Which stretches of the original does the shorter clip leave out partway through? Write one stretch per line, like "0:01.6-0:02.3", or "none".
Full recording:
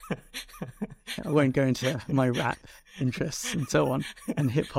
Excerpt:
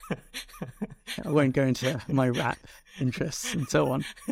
none